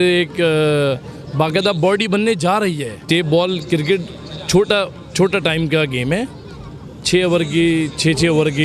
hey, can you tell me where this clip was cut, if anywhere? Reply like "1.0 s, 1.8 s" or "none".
3.0 s